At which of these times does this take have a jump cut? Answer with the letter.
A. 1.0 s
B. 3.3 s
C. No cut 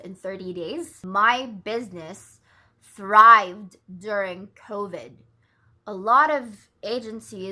A